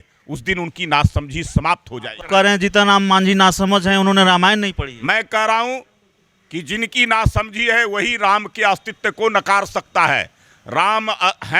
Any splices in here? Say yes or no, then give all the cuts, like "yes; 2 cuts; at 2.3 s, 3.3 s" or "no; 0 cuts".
yes; 1 cut; at 2.2 s